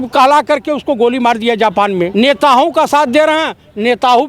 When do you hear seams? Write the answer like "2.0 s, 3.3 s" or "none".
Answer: 2.1 s